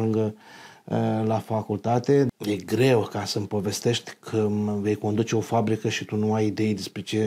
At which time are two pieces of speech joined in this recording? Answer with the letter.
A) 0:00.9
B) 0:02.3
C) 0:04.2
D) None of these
B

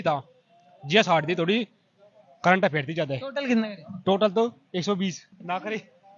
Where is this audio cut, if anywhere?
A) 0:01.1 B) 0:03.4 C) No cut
C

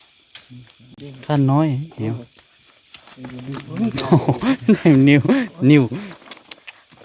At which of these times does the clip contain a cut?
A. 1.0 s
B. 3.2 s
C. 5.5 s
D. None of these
D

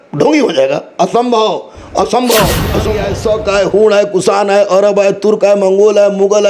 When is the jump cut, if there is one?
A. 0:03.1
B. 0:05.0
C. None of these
A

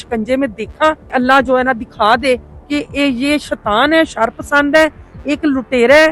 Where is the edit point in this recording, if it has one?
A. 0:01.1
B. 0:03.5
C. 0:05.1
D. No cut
A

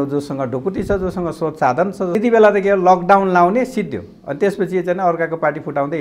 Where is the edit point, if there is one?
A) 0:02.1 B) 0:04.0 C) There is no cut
A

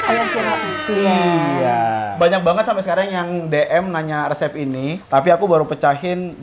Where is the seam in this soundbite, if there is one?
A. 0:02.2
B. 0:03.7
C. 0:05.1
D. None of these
A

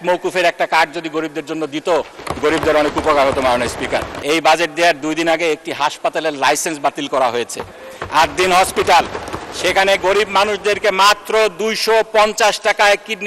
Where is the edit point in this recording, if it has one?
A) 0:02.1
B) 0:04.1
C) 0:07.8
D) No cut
B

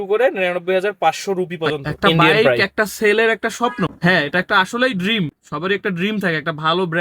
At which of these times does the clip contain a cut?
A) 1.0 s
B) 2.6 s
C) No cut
B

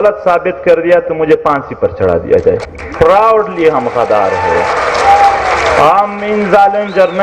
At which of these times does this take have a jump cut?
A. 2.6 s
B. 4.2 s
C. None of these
A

